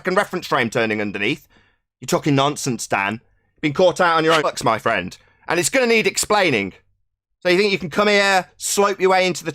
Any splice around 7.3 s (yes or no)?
no